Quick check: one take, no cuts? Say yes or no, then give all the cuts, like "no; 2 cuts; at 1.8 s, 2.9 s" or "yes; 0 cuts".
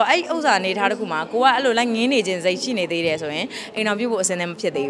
yes; 0 cuts